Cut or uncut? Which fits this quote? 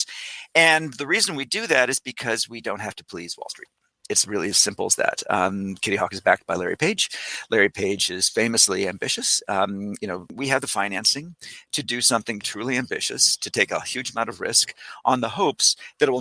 cut